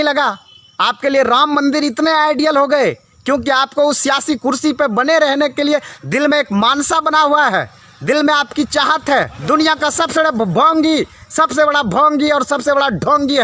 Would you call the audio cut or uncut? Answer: cut